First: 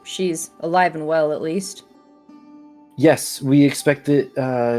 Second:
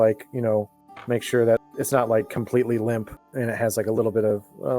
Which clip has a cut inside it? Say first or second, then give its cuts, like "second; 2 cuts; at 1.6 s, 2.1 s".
second; 2 cuts; at 1.7 s, 3.2 s